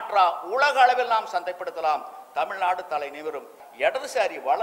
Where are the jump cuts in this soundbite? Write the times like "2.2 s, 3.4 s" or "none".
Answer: 3.6 s

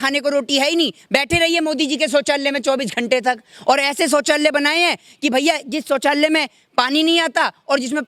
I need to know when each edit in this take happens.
none

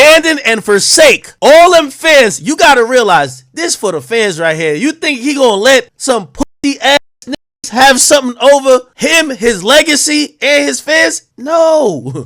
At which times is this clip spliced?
none

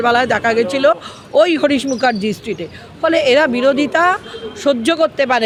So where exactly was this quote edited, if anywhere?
none

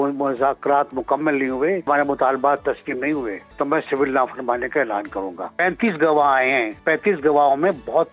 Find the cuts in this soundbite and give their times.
1.9 s, 3.4 s, 5.5 s, 6.8 s

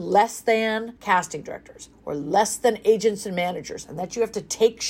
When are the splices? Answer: 0.9 s

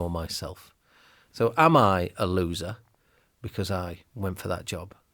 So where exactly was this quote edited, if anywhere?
1.2 s

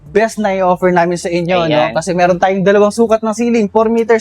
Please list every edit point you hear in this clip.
none

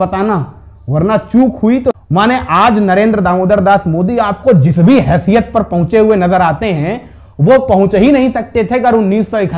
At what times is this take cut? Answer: 1.9 s

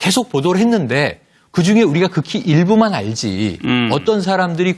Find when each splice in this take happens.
none

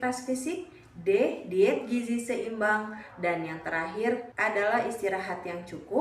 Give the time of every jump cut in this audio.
4.3 s

